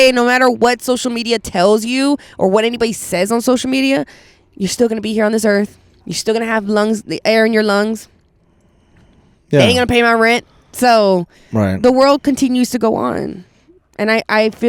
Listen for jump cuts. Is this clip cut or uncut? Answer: uncut